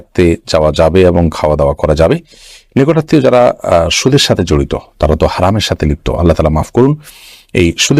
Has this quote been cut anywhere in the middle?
no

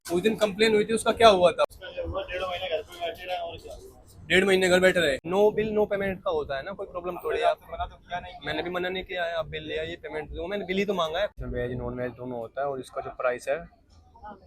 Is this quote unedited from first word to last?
no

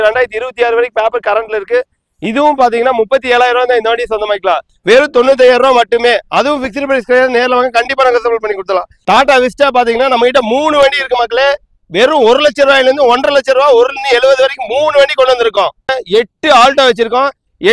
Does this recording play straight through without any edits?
no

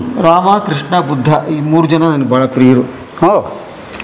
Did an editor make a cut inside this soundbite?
no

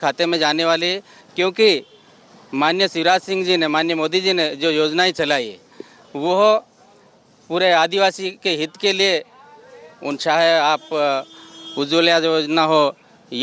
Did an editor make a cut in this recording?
no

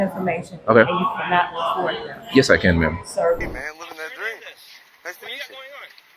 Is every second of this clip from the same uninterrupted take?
no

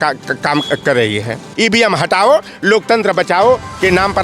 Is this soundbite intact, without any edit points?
no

